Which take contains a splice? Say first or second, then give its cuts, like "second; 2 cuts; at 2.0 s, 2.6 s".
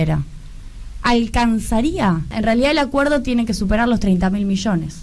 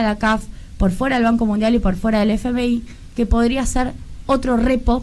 first; 1 cut; at 2.3 s